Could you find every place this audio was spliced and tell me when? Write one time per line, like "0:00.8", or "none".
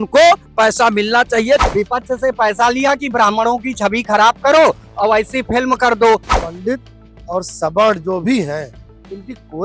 0:01.6
0:06.3